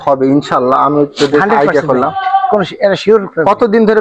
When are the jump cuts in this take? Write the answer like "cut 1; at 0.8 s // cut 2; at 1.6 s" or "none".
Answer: none